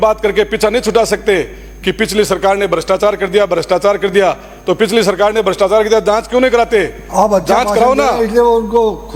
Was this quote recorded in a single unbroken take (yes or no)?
yes